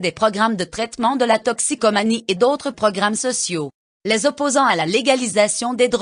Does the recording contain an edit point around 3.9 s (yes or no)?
yes